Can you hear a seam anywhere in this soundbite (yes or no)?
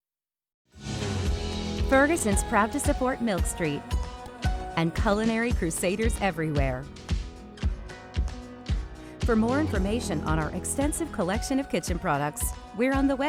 no